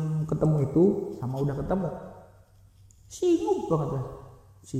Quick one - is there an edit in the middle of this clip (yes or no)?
no